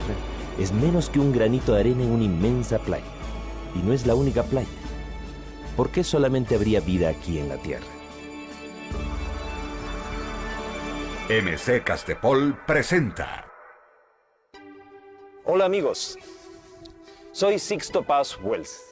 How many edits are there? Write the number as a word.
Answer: one